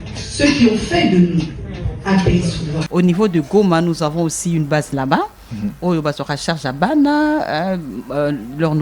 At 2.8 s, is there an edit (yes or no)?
yes